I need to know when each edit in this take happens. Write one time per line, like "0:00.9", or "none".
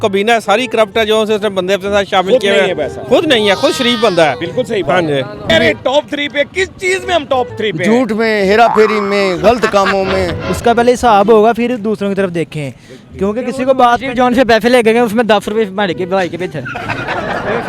0:05.4
0:10.4